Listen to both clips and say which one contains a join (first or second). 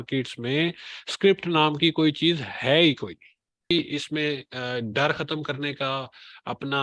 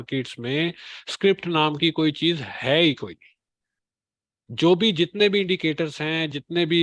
first